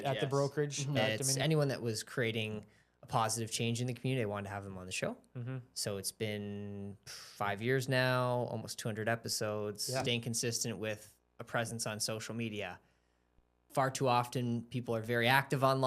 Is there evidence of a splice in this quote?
yes; 2 cuts; at 1.2 s, 10.0 s

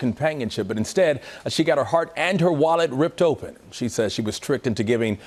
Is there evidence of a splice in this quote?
no; 0 cuts

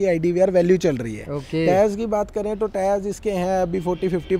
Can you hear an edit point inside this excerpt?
no; 0 cuts

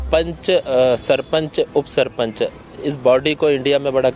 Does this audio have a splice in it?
no; 0 cuts

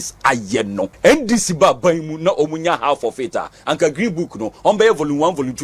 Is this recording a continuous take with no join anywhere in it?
no; 1 cut; at 0.9 s

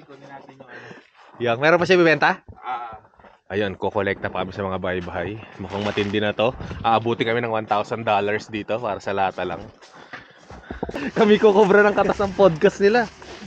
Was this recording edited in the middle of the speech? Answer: yes; 1 cut; at 11.0 s

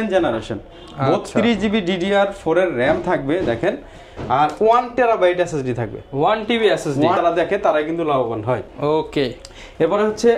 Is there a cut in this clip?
yes; 1 cut; at 7.2 s

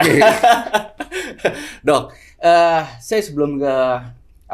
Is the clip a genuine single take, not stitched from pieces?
yes; 0 cuts

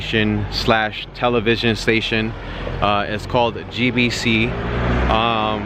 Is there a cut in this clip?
no; 0 cuts

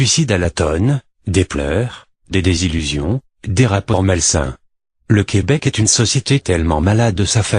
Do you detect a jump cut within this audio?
yes; 1 cut; at 3.8 s

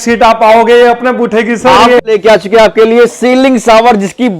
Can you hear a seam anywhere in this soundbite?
yes; 1 cut; at 2.0 s

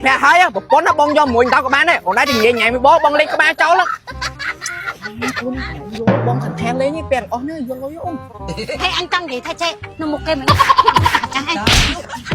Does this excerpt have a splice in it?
no; 0 cuts

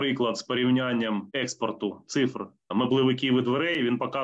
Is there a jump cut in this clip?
yes; 2 cuts; at 1.3 s, 2.7 s

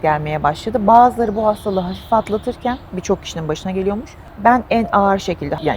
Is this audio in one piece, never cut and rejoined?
yes; 0 cuts

